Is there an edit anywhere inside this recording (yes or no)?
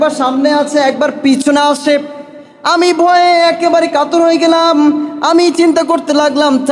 no